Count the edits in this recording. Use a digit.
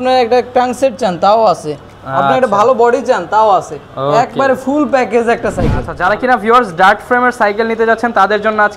1